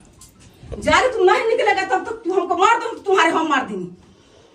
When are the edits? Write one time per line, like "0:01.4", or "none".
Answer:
none